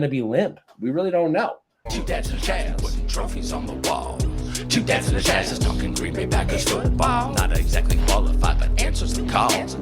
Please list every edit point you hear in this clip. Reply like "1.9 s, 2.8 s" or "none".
1.7 s